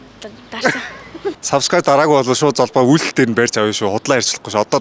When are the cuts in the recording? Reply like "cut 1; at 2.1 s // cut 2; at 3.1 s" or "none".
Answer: cut 1; at 1.4 s